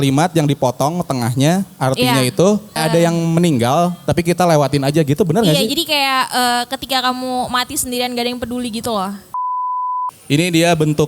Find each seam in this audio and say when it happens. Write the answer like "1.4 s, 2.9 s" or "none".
2.8 s, 9.6 s